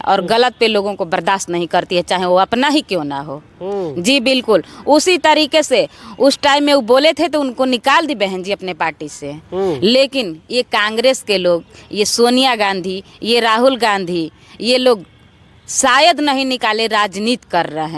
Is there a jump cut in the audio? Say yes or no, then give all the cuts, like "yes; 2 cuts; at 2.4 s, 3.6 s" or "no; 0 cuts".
no; 0 cuts